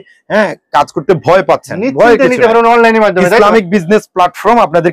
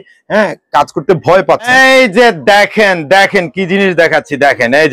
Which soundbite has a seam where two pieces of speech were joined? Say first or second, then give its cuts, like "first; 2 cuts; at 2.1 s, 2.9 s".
second; 1 cut; at 1.7 s